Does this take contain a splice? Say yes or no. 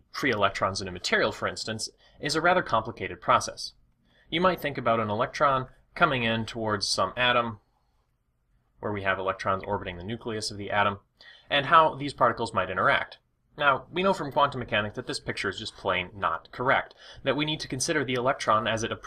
no